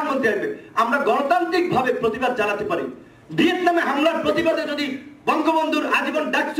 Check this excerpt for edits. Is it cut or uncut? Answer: uncut